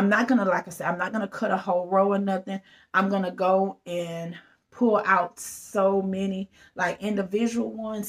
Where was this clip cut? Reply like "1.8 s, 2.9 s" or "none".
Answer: none